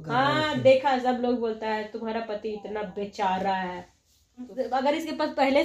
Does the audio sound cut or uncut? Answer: cut